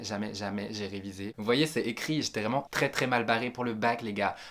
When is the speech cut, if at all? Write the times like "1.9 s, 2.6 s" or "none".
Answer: 1.3 s